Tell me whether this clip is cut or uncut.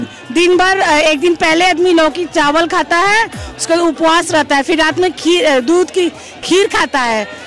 uncut